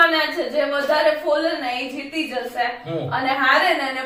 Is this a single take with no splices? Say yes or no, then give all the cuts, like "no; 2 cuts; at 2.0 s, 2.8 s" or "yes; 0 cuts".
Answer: yes; 0 cuts